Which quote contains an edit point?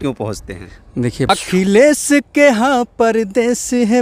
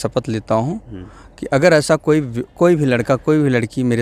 first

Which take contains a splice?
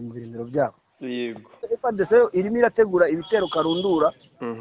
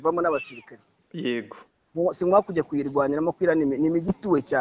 first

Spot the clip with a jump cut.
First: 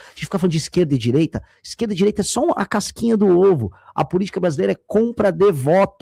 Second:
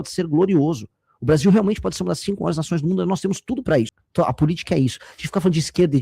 second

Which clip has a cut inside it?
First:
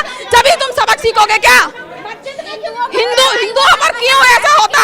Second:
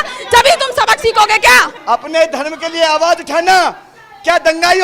second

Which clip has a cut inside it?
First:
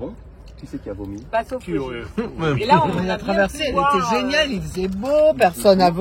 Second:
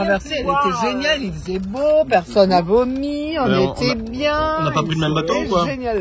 first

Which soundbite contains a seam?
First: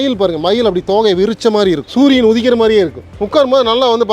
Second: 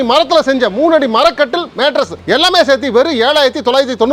first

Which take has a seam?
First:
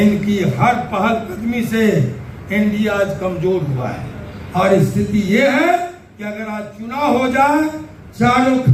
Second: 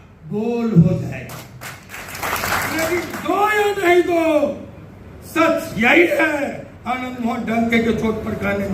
second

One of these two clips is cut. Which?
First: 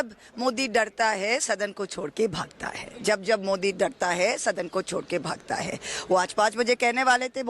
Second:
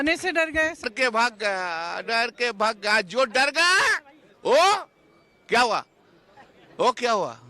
second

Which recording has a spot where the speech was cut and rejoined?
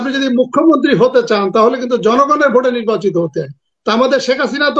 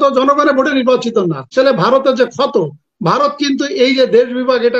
second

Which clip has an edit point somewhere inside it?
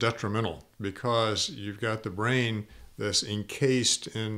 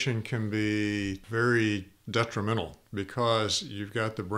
second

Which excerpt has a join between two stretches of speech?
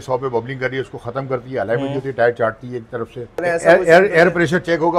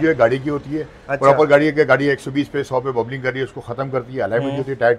first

